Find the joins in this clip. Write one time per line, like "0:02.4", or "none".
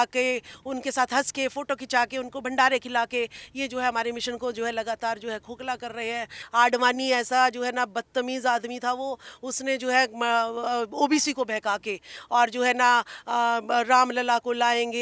0:06.4